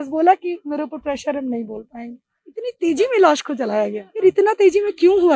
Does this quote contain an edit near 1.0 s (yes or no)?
no